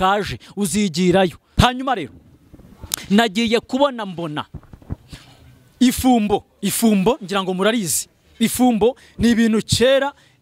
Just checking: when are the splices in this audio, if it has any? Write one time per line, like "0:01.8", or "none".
0:01.6